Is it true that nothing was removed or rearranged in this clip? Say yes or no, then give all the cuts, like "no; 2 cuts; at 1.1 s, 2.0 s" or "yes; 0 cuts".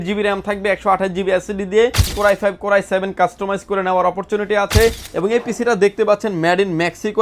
no; 2 cuts; at 2.1 s, 5.1 s